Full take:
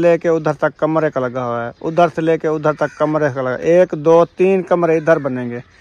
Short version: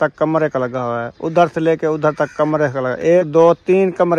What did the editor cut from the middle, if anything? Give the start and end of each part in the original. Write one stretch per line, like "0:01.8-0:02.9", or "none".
0:03.9-0:04.0